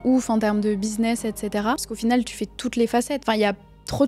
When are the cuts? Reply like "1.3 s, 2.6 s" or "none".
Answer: 1.9 s, 3.2 s